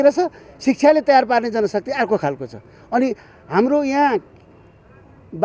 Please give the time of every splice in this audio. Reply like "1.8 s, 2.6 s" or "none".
none